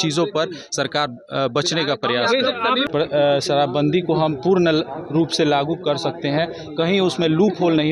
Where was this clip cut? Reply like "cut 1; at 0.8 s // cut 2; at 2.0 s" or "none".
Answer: cut 1; at 2.9 s